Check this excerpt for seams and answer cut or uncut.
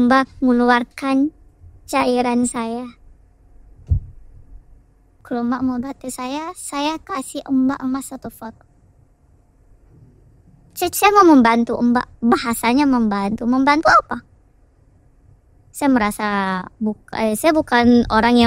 cut